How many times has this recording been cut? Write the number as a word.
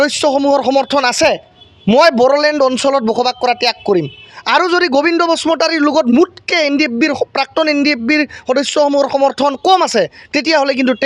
zero